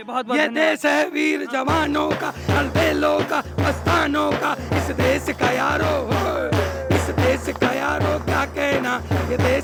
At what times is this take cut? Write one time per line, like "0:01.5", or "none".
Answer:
none